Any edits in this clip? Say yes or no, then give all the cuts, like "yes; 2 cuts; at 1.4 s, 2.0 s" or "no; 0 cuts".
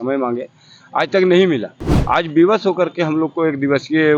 no; 0 cuts